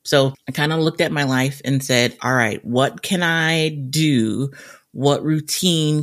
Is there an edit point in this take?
no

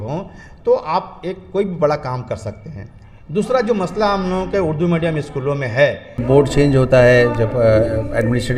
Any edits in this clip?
yes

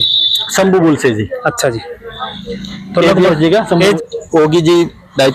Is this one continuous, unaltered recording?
yes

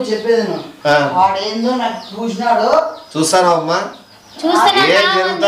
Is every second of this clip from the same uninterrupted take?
yes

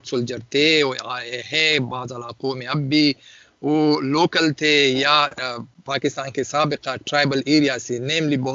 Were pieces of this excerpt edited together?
no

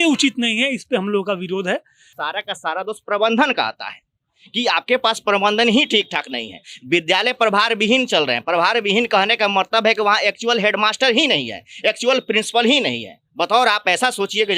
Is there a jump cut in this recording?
yes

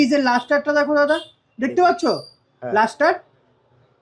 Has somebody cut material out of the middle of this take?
no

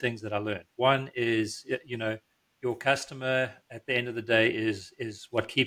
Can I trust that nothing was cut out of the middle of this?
yes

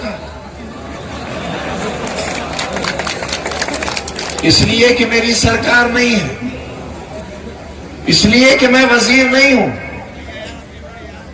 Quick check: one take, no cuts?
yes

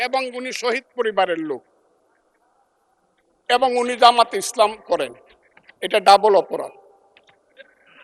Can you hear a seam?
no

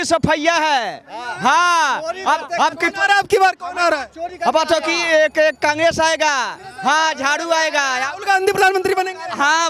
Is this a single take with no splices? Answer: yes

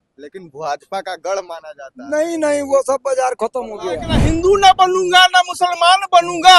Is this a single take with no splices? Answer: no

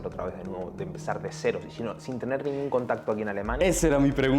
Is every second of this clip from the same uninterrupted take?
yes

